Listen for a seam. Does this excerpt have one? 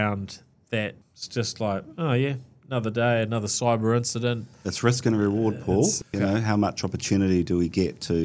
yes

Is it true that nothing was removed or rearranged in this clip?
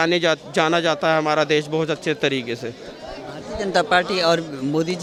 yes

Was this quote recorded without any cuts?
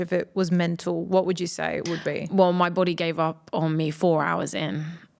yes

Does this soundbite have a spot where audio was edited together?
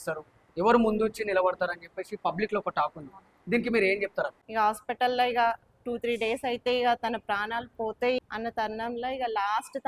yes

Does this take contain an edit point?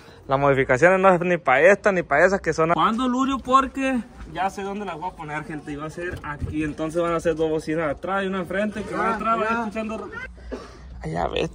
yes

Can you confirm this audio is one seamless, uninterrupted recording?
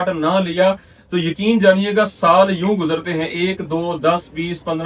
yes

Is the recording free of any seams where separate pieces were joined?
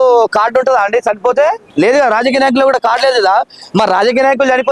no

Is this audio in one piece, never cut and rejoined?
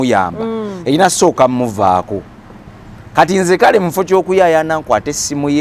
yes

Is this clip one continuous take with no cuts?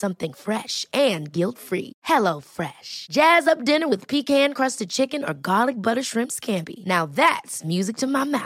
yes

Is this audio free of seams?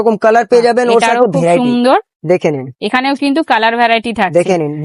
yes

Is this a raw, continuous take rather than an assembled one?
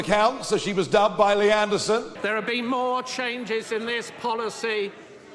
no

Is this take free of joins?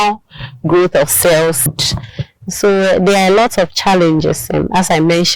no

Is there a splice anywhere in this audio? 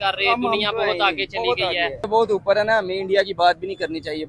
yes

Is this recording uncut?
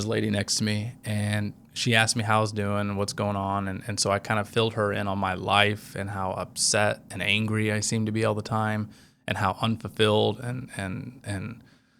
no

